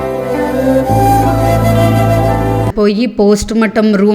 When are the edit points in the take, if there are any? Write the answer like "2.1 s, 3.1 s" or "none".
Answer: 2.7 s